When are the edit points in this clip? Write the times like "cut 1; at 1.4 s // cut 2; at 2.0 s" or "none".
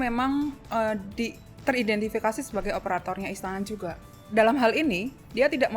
cut 1; at 4.0 s